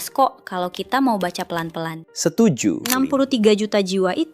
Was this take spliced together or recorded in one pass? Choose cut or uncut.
cut